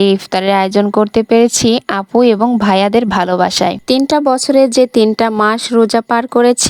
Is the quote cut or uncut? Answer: uncut